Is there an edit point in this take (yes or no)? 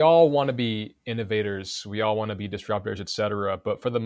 no